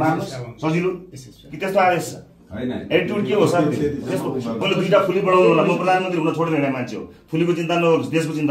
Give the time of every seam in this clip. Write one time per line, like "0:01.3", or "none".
0:04.6